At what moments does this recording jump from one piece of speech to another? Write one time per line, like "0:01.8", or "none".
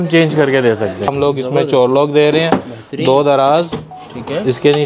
0:01.1